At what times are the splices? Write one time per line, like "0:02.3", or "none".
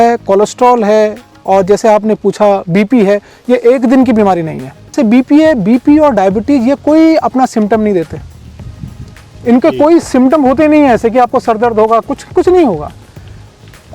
0:04.9